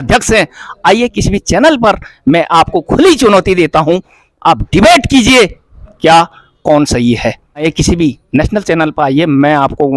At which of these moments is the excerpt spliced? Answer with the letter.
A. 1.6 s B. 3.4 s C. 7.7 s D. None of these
C